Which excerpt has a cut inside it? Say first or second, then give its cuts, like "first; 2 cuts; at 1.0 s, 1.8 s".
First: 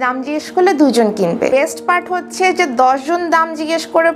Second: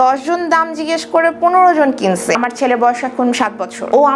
second; 1 cut; at 2.4 s